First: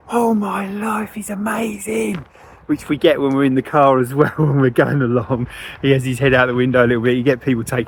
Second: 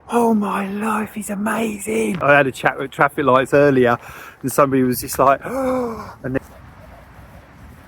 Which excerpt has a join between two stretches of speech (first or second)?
second